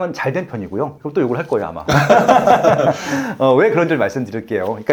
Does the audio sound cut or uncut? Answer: uncut